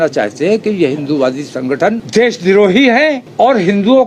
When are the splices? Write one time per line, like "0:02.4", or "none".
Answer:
0:02.0
0:03.2